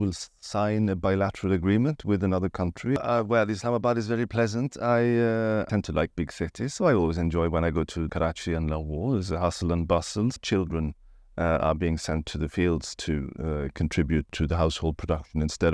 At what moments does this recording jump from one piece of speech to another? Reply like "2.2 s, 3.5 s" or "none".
3.0 s, 5.7 s, 8.1 s, 10.4 s, 14.3 s